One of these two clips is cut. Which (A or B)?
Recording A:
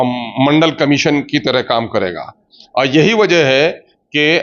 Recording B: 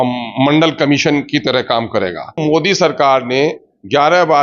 B